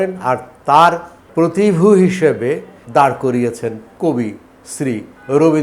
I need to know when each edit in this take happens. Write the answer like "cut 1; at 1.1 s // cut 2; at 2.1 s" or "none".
cut 1; at 1.2 s // cut 2; at 2.7 s // cut 3; at 3.9 s